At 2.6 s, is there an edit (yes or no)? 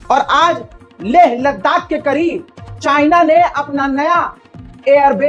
no